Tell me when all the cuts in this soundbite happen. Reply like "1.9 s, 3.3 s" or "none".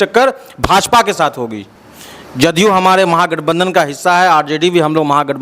none

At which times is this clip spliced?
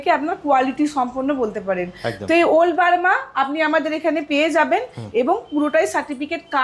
none

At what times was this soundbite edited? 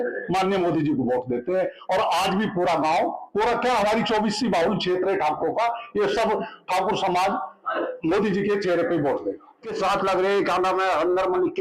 9.7 s

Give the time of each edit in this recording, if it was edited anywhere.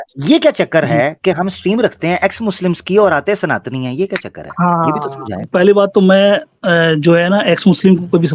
5.4 s

